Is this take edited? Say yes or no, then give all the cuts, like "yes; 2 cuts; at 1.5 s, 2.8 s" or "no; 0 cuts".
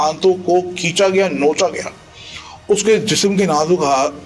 no; 0 cuts